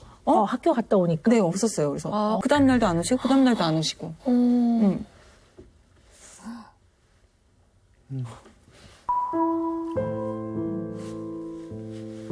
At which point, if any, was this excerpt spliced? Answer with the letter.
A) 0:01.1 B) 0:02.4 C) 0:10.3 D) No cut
B